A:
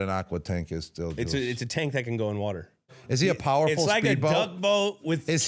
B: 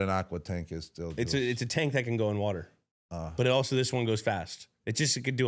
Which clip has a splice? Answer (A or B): A